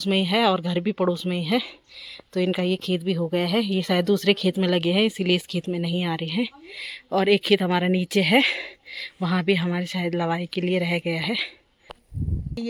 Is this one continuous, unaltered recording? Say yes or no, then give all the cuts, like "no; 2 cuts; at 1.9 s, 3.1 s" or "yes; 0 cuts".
yes; 0 cuts